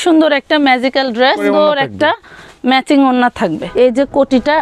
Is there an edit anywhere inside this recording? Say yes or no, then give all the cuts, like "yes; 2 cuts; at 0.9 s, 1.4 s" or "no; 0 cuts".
yes; 2 cuts; at 1.4 s, 3.6 s